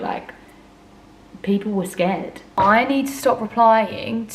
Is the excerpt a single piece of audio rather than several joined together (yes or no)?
no